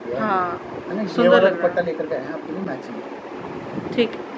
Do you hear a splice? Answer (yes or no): no